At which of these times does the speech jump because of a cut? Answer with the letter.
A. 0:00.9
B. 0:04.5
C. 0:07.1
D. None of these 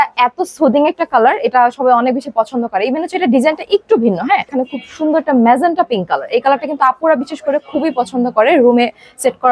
B